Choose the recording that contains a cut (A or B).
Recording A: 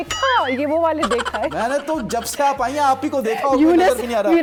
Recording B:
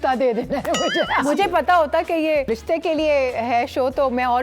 B